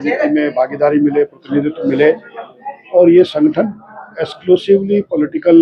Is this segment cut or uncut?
uncut